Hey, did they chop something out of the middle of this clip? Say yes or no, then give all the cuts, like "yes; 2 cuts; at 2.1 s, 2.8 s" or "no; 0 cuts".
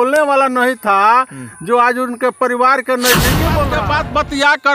yes; 1 cut; at 3.6 s